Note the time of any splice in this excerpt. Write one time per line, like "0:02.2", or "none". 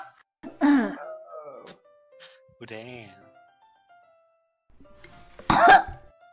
0:03.8